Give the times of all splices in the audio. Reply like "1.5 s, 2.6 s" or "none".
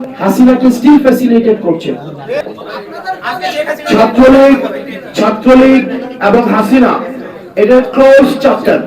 2.4 s